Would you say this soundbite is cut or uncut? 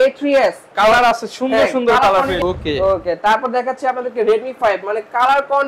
cut